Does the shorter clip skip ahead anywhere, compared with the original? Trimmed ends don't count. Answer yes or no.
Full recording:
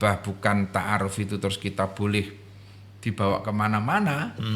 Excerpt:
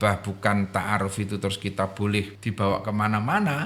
yes